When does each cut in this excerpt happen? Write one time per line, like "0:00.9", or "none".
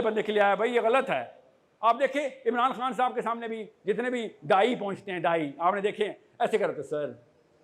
none